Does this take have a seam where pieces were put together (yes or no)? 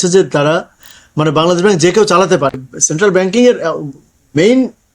yes